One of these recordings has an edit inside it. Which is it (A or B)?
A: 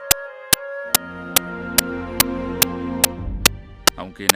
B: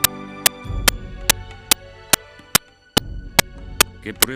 B